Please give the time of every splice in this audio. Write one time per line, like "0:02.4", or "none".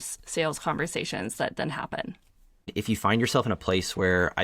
0:02.7